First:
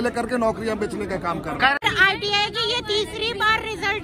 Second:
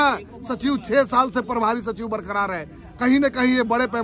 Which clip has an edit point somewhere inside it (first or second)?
first